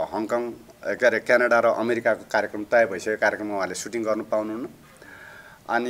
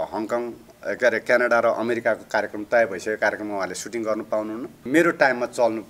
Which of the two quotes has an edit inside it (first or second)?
second